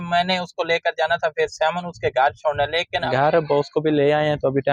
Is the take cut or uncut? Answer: cut